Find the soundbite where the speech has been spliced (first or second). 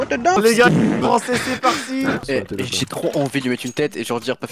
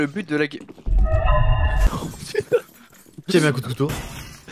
first